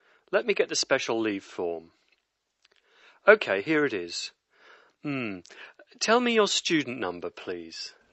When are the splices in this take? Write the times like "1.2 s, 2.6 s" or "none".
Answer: none